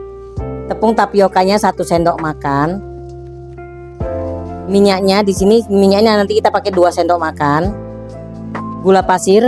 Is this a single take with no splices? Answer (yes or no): no